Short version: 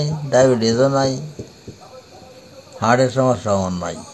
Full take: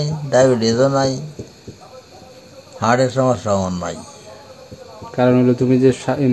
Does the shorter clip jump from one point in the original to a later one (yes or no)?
no